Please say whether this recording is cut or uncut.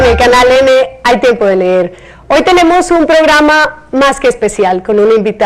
cut